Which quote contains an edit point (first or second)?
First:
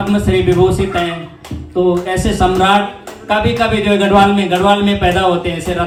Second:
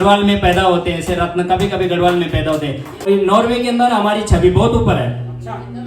second